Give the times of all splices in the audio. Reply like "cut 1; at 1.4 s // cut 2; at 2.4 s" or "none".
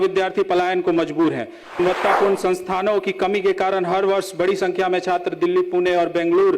cut 1; at 1.8 s